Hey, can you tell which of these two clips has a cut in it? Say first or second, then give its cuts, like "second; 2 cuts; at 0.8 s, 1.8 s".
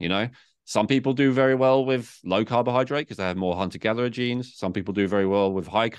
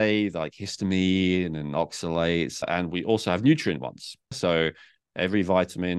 second; 2 cuts; at 2.7 s, 4.3 s